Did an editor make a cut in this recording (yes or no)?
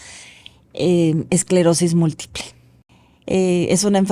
yes